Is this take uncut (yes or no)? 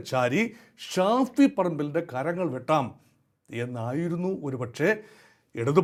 yes